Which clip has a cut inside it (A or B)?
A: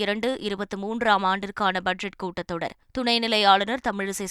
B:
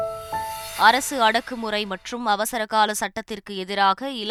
A